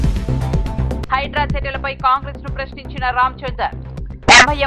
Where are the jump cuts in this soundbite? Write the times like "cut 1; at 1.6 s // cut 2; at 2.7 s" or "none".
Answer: none